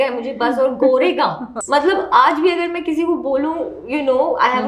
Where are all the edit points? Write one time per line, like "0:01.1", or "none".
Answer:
0:01.5

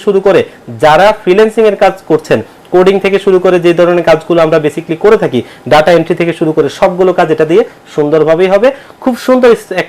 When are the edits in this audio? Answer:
none

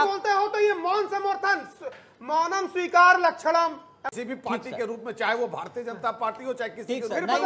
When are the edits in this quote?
0:04.0

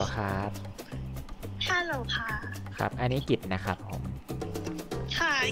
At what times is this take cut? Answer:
none

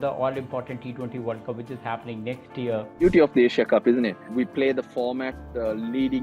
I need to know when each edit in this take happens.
0:03.0
0:04.3

